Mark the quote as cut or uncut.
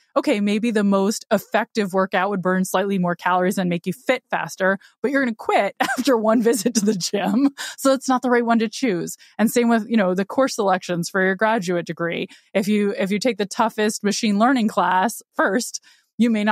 uncut